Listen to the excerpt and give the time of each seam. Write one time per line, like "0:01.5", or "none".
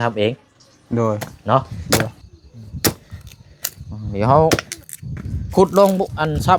0:01.9